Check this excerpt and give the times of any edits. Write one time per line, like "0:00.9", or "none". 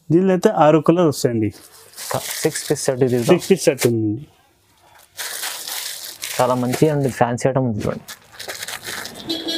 none